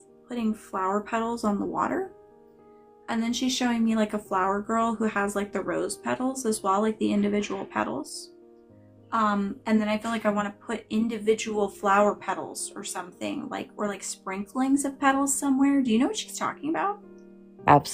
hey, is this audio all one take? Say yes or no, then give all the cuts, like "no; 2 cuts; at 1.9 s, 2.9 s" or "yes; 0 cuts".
yes; 0 cuts